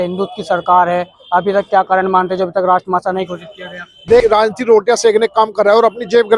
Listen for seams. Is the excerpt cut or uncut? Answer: cut